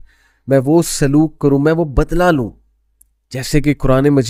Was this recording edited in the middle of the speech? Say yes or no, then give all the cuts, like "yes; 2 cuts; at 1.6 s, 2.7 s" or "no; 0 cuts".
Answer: no; 0 cuts